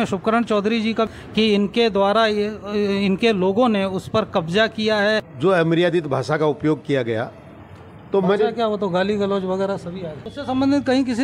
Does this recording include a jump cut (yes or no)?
yes